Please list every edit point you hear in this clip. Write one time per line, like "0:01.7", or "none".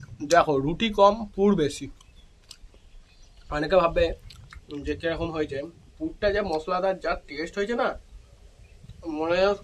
none